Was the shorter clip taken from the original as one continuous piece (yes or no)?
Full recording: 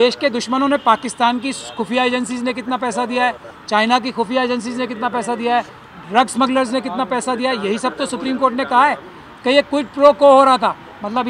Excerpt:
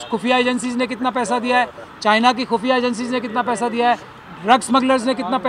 yes